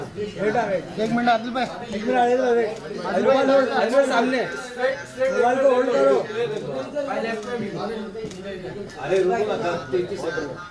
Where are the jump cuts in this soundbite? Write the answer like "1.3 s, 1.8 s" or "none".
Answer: none